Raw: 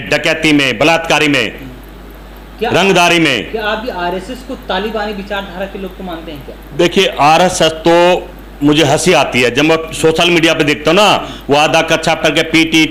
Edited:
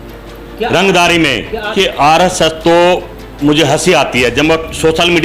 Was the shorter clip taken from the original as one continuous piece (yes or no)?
no